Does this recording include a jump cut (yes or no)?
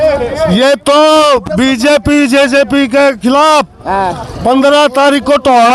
no